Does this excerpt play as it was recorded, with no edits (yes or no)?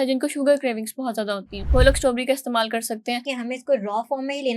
no